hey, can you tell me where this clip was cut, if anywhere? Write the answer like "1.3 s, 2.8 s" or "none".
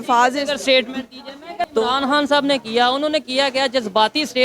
1.5 s